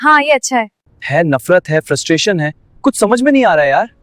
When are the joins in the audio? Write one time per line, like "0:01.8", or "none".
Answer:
0:00.9